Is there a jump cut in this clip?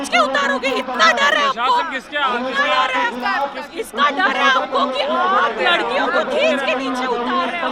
no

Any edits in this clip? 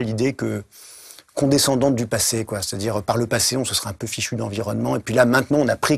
no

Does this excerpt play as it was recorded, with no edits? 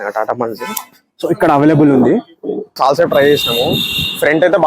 no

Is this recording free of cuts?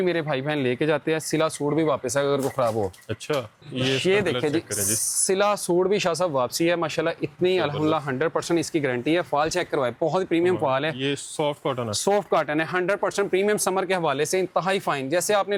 yes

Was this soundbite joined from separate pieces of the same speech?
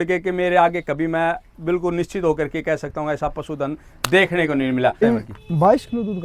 yes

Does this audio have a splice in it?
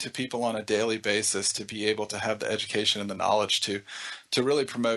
no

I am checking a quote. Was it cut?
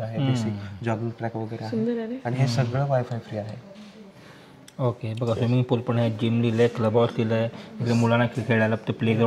no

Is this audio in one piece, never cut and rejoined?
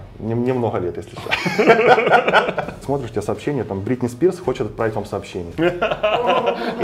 no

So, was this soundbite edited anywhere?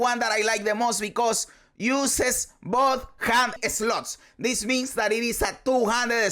yes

